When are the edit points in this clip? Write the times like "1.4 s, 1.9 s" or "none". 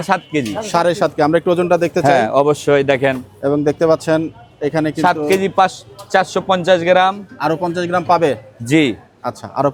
none